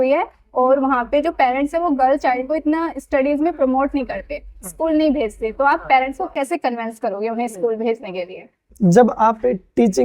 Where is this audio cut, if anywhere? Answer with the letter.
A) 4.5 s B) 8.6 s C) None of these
B